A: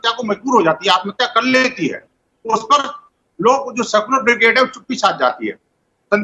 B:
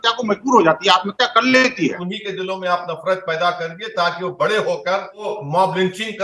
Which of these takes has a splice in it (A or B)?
B